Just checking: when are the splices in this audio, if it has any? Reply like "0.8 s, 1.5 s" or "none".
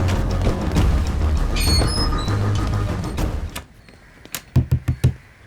3.4 s